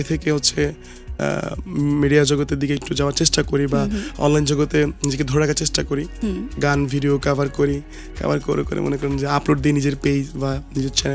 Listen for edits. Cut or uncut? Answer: uncut